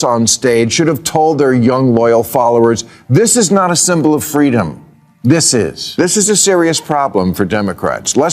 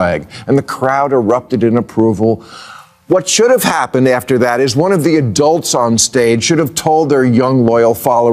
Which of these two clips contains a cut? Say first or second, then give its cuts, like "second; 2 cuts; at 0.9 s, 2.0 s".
first; 1 cut; at 5.9 s